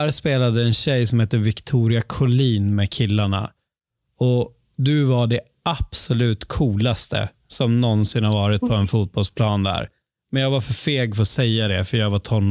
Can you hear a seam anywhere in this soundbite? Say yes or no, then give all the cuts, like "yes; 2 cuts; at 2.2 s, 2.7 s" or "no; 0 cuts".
no; 0 cuts